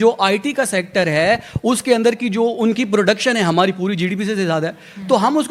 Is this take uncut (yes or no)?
yes